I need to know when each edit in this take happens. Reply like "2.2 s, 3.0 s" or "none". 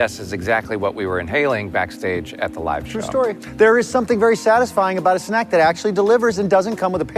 3.4 s